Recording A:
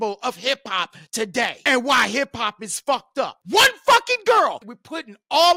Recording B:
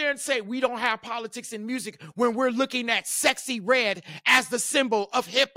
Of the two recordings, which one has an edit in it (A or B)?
A